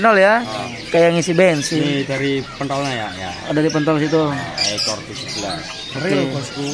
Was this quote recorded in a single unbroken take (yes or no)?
yes